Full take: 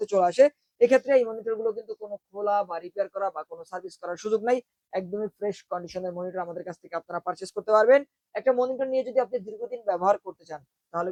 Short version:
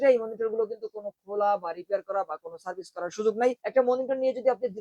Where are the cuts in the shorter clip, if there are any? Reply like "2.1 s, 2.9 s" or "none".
3.6 s